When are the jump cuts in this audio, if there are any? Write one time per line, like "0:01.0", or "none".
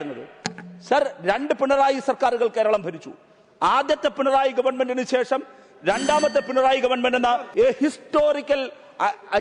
0:07.5